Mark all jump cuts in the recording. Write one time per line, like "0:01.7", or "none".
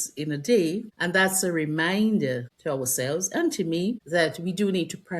0:00.9
0:02.5
0:04.0